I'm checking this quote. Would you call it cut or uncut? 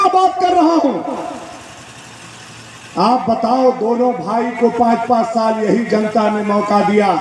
uncut